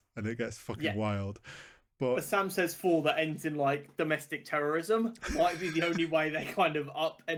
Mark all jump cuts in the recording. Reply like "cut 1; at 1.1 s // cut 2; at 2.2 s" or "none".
none